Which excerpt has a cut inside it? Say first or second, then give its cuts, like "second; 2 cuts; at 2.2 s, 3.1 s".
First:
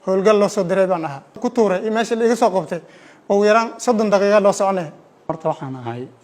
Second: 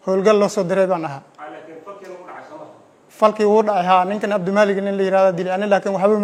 first; 2 cuts; at 1.4 s, 5.3 s